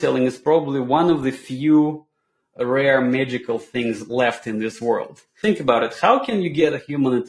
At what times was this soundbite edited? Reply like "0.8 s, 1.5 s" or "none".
5.4 s, 6.6 s